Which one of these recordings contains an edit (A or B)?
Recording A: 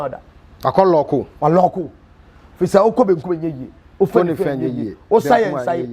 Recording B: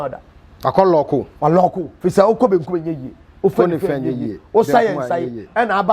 B